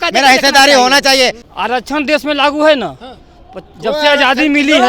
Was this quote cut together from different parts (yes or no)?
yes